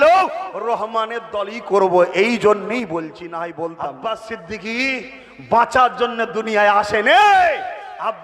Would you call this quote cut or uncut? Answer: cut